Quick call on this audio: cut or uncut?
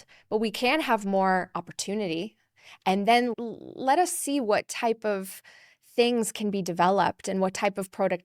cut